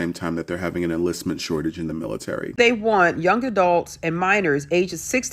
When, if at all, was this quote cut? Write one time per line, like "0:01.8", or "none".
0:02.5